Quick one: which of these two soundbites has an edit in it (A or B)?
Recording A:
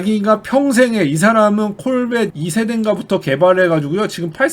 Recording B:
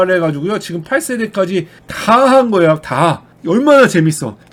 A